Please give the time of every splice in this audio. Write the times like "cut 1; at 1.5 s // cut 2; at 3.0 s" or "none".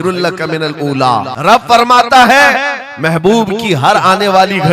cut 1; at 1.3 s